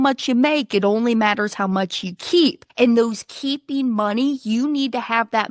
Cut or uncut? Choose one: cut